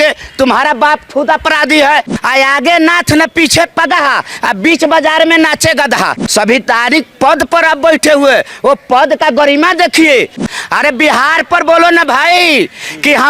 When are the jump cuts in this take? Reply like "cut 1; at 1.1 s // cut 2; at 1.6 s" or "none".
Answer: cut 1; at 2.1 s // cut 2; at 6.2 s // cut 3; at 10.5 s